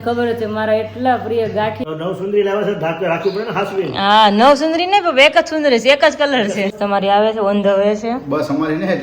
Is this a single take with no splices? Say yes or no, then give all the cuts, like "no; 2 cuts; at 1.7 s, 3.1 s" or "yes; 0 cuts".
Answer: no; 2 cuts; at 1.8 s, 6.7 s